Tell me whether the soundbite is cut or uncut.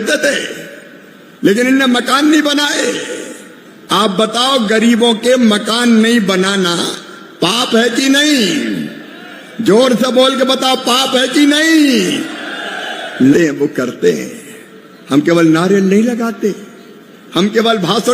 cut